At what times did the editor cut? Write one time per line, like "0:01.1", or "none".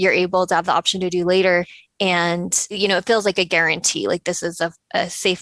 0:01.8
0:02.8